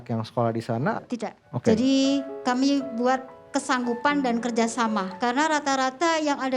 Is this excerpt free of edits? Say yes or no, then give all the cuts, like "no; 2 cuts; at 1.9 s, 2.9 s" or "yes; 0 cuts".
no; 2 cuts; at 1.0 s, 5.1 s